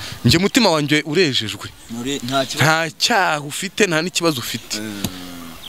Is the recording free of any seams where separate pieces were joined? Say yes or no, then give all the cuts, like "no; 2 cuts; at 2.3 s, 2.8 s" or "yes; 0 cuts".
yes; 0 cuts